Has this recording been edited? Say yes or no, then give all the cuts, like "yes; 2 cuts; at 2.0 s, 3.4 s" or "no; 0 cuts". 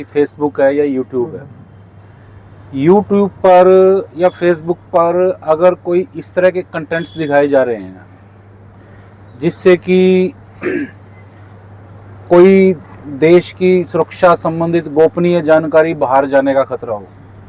no; 0 cuts